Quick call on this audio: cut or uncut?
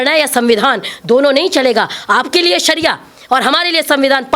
uncut